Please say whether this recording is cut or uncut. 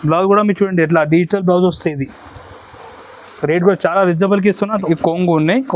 cut